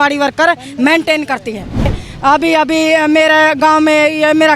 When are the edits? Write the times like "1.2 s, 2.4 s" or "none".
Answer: 1.9 s